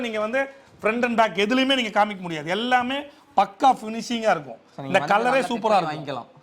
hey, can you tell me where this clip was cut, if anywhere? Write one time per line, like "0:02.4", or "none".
none